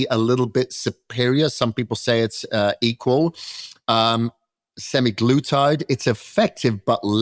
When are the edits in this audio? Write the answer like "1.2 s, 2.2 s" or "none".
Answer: none